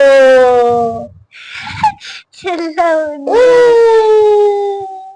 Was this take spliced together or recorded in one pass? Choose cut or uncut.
uncut